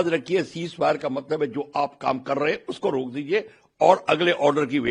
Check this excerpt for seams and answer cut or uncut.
uncut